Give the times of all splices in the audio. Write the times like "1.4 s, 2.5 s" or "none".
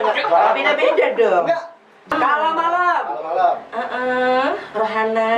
2.1 s

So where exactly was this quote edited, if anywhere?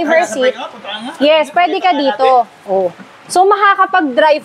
none

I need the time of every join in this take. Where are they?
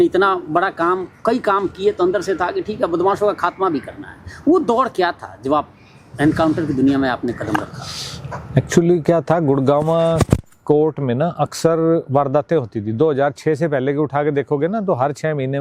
none

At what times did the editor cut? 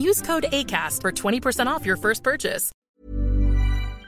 2.7 s

